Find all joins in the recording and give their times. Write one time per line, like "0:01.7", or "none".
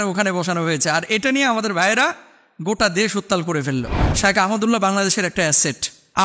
0:04.0